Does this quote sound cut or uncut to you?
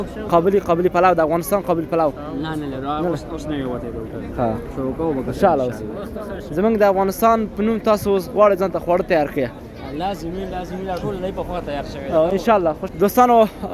cut